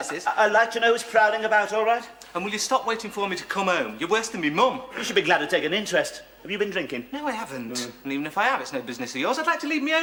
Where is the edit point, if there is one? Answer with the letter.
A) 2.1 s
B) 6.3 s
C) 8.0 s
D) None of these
D